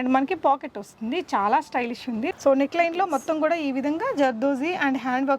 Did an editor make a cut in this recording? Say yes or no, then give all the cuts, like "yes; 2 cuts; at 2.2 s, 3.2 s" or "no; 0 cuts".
yes; 1 cut; at 2.3 s